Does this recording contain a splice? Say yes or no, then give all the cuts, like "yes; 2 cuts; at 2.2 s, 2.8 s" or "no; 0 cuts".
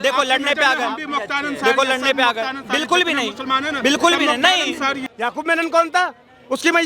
yes; 1 cut; at 5.1 s